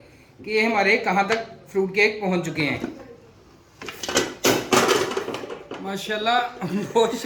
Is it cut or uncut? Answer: uncut